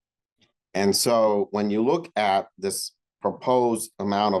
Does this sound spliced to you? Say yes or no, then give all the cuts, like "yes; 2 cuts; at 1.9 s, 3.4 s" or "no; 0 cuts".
no; 0 cuts